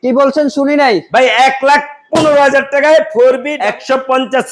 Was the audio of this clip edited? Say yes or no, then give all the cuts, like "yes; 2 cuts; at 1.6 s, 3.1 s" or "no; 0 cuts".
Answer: yes; 1 cut; at 3.5 s